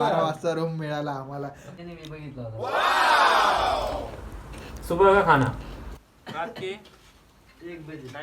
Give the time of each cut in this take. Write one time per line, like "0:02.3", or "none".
0:01.7

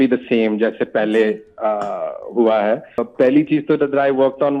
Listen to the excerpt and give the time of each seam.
0:03.1

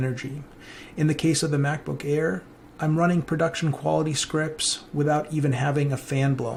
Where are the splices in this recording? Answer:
none

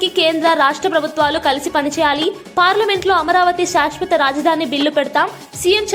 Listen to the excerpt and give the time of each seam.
none

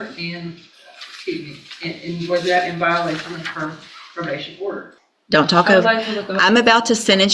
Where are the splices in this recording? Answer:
0:04.9

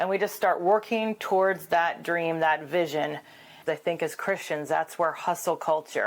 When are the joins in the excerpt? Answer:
0:03.6

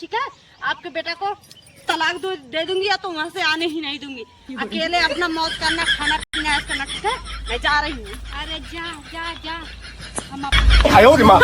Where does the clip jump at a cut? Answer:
0:10.6

